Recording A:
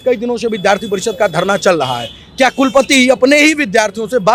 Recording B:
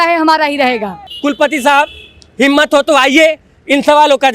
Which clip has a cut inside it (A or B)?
B